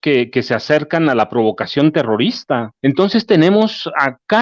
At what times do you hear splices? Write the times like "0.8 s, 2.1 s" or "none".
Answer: 2.7 s